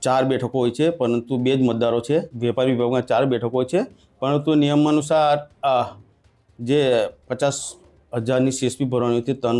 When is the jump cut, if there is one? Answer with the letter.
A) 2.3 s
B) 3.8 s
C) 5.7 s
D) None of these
A